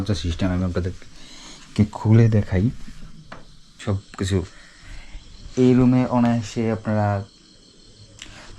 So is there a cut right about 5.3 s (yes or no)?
no